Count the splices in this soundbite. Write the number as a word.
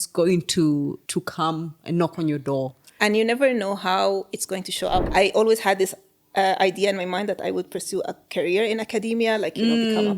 two